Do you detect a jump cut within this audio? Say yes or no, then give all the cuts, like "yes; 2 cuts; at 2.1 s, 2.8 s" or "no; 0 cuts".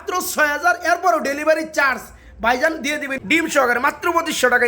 yes; 1 cut; at 3.1 s